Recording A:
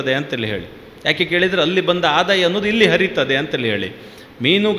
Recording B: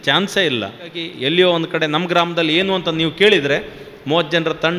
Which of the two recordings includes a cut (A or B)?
B